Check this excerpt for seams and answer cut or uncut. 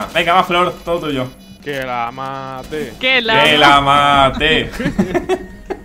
cut